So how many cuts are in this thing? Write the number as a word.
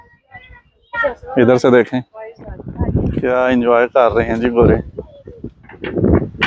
one